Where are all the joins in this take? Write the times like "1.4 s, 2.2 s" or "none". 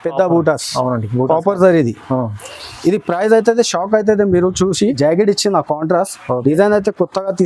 5.0 s

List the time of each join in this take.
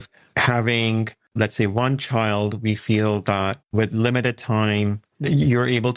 5.1 s

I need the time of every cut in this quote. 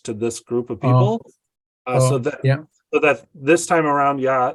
none

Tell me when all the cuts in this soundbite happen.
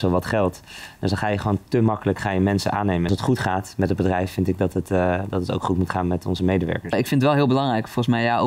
3.1 s, 6.9 s

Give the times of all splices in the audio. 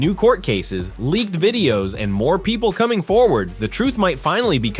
none

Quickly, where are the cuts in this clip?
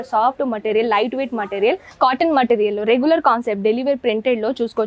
1.9 s

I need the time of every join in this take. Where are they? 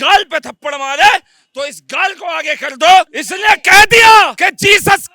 3.2 s, 4.3 s

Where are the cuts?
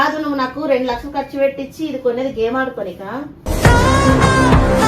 none

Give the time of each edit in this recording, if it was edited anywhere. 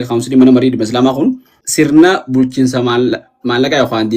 1.6 s

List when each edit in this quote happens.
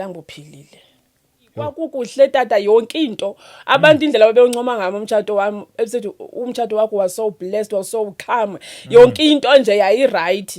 1.7 s

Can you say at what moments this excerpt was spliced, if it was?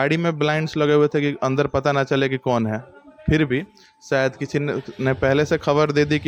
none

